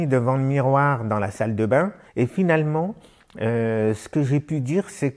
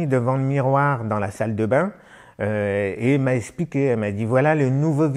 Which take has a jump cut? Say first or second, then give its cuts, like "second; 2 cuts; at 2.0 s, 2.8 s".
first; 1 cut; at 2.0 s